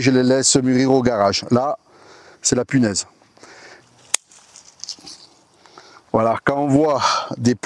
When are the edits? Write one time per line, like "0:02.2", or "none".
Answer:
none